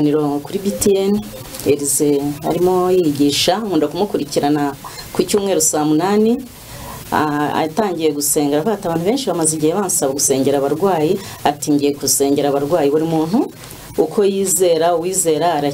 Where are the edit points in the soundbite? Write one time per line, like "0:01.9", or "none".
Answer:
none